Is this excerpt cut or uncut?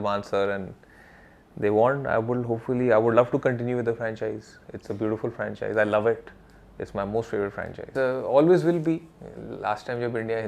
cut